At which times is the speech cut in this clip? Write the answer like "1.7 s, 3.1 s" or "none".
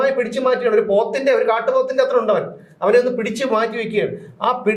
none